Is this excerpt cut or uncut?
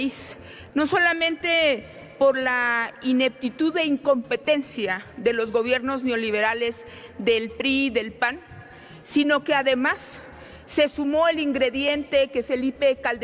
uncut